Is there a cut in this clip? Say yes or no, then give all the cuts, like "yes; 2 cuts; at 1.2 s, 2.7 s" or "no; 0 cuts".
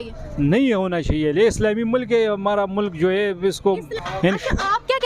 yes; 1 cut; at 4.0 s